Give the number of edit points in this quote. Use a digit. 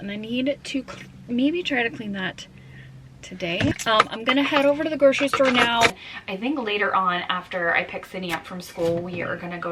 2